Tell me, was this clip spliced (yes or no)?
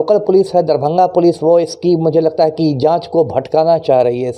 no